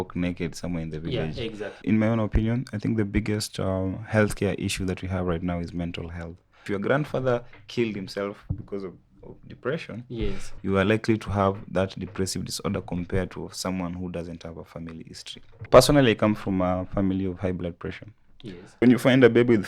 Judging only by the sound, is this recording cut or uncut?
cut